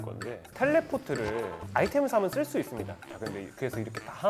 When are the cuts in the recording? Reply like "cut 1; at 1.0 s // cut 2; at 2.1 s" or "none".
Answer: cut 1; at 3.0 s